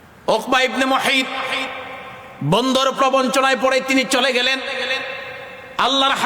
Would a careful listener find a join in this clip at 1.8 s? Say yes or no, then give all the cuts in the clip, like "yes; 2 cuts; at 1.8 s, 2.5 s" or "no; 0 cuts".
yes; 1 cut; at 1.8 s